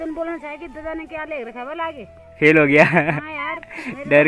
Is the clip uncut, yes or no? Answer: yes